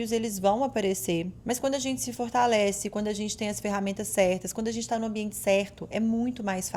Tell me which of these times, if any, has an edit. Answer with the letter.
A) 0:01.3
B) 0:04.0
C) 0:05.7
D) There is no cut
A